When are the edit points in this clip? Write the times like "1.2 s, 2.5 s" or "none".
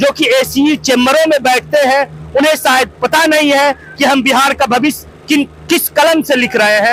none